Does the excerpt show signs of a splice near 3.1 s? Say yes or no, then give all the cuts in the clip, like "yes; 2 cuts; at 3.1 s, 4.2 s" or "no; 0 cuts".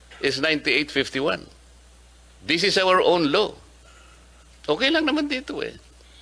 no; 0 cuts